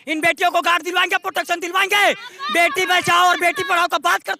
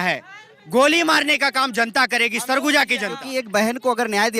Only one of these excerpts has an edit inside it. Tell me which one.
second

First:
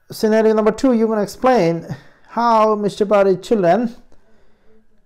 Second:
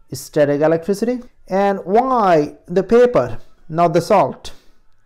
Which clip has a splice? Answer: second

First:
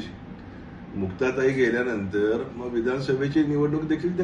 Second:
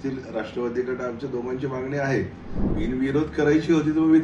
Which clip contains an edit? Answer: second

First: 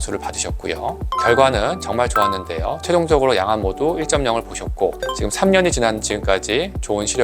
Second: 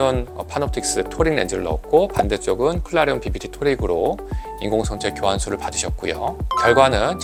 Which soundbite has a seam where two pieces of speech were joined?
first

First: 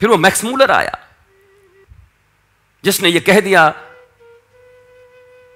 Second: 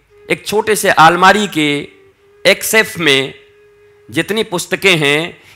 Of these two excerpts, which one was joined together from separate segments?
first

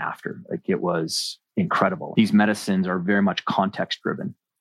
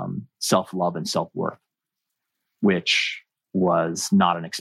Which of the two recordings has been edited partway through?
first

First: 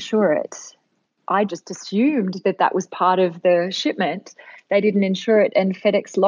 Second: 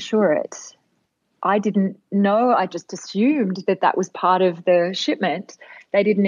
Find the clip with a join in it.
first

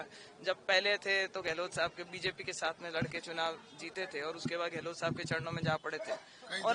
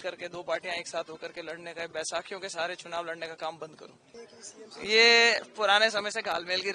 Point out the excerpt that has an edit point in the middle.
second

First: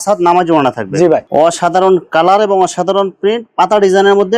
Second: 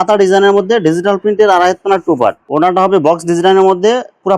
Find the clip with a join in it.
second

